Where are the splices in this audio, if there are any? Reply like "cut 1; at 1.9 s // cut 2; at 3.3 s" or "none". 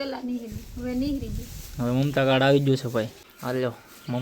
cut 1; at 3.2 s